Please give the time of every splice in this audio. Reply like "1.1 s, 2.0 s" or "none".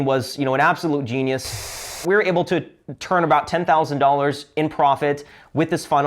1.8 s